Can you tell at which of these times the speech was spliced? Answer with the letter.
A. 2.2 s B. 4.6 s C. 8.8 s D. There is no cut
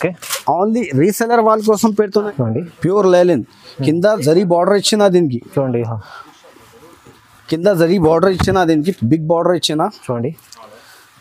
A